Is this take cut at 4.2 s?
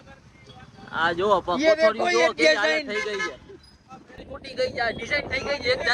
yes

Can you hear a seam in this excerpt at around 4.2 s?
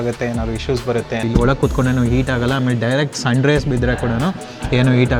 no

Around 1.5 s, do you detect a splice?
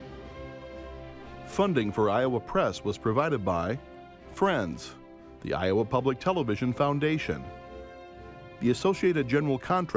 yes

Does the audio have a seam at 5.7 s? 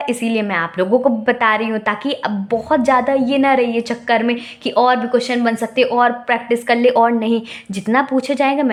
no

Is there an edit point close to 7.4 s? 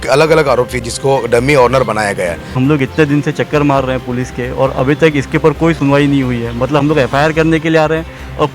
no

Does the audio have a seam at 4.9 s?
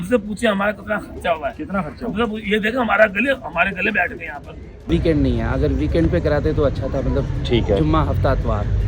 yes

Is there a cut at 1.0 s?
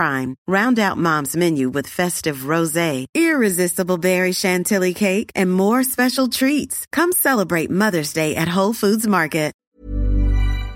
no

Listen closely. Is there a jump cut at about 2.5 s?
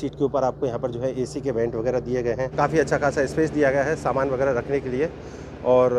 yes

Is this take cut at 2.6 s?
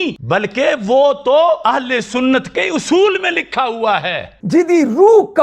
no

